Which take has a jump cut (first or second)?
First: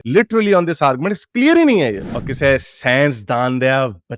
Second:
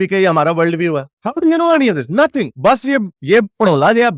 first